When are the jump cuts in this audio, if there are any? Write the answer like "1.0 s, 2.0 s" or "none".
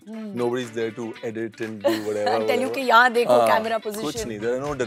none